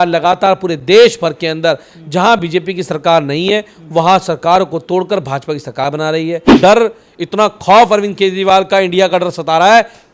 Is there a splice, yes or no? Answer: yes